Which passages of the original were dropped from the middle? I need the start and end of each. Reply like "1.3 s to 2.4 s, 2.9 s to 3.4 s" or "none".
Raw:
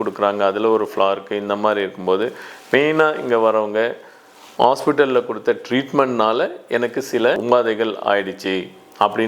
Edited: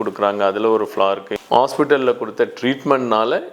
1.3 s to 4.4 s